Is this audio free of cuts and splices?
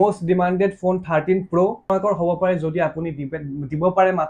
no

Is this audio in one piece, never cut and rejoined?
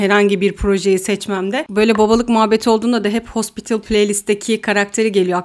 yes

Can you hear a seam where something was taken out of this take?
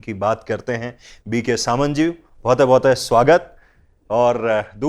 no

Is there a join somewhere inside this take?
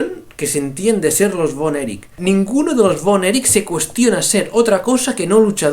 yes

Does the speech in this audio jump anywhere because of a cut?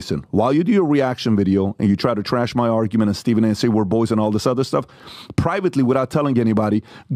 no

